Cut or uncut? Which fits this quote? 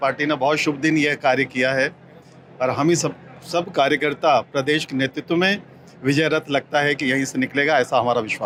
uncut